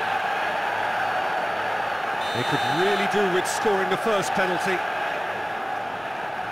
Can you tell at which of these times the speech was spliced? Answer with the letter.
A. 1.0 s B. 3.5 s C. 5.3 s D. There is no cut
D